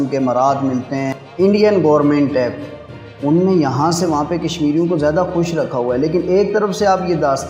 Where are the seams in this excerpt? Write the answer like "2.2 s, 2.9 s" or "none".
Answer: 1.1 s

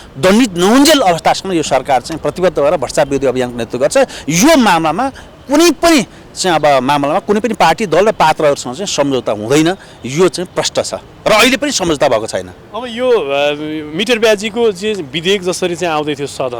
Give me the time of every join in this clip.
none

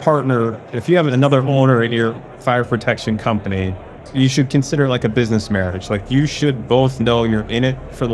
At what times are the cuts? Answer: 1.1 s, 4.1 s

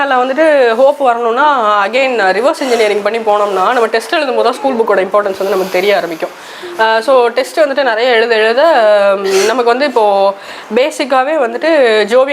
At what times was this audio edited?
none

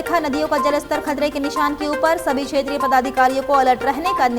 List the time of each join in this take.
none

